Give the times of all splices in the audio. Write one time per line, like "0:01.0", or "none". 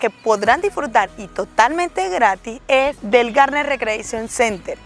none

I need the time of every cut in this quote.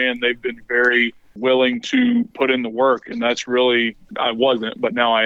0:01.3
0:02.3
0:04.1

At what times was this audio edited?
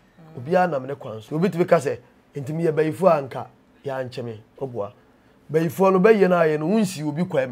0:01.1

